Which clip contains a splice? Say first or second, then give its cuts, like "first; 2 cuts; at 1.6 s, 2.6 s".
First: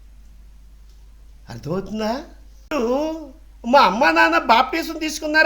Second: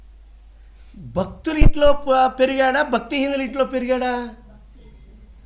first; 1 cut; at 2.7 s